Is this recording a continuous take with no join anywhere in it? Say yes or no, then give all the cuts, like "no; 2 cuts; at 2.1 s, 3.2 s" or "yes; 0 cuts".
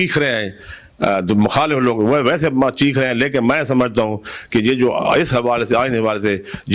yes; 0 cuts